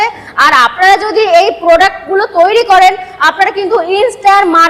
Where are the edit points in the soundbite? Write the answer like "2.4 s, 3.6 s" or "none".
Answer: none

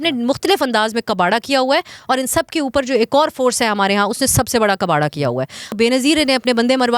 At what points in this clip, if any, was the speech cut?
5.7 s

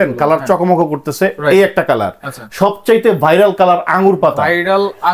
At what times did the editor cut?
none

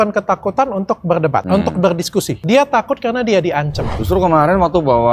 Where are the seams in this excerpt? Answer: 1.4 s, 2.3 s, 3.9 s

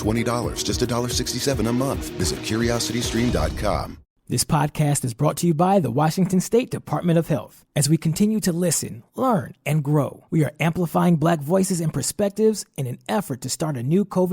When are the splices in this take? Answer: 3.9 s

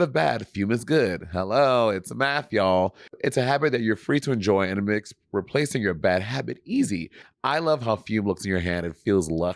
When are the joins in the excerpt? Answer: 7.2 s

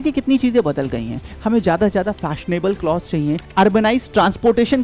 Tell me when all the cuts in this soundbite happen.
3.4 s

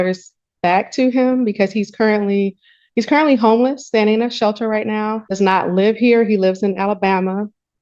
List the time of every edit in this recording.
5.2 s

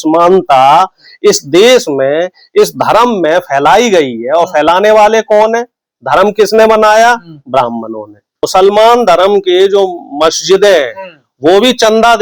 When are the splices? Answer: 8.4 s

